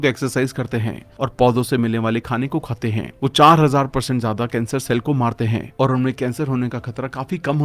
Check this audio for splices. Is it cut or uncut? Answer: uncut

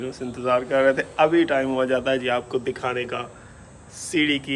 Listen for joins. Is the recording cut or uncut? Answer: uncut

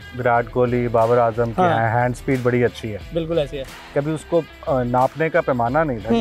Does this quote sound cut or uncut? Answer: cut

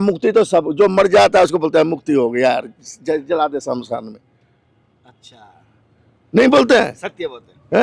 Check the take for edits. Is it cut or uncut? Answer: uncut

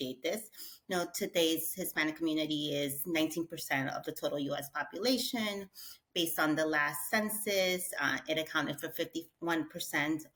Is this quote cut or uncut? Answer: uncut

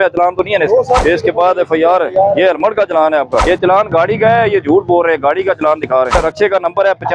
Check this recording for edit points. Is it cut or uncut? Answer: cut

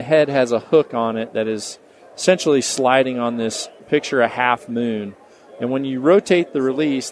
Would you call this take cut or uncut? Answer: uncut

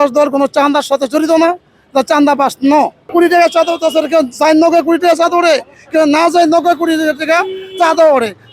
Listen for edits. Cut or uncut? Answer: cut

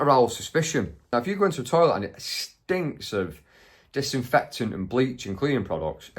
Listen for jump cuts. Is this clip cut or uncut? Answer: cut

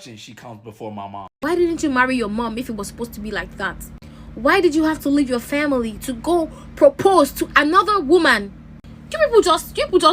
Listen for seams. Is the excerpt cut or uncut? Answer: cut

